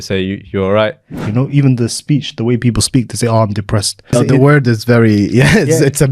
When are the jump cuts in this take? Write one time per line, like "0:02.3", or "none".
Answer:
0:01.1
0:04.1